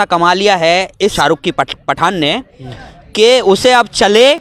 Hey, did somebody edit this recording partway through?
yes; 1 cut; at 1.1 s

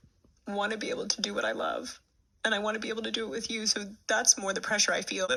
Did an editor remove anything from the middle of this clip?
no; 0 cuts

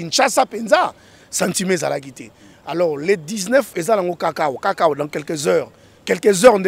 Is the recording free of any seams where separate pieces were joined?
yes; 0 cuts

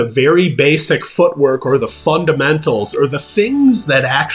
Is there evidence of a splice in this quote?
no; 0 cuts

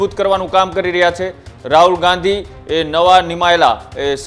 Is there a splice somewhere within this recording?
no; 0 cuts

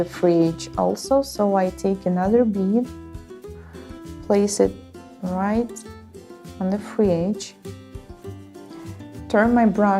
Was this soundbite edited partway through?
yes; 1 cut; at 3.4 s

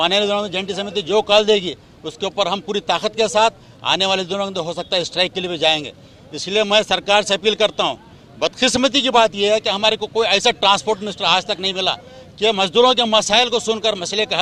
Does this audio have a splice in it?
no; 0 cuts

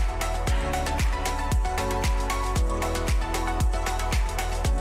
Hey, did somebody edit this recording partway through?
no; 0 cuts

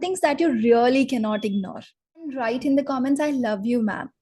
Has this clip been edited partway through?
yes; 1 cut; at 2.3 s

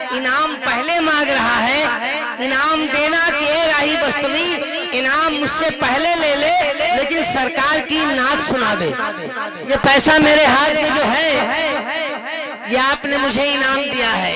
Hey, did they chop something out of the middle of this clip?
yes; 1 cut; at 9.7 s

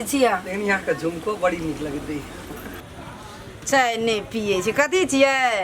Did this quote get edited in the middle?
yes; 1 cut; at 3.1 s

